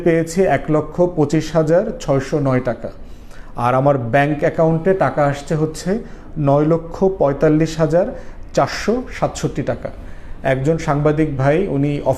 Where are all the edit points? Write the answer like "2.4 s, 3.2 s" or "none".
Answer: none